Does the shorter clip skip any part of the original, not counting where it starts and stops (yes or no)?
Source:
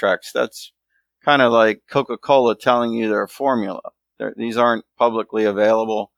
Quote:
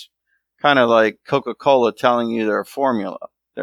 no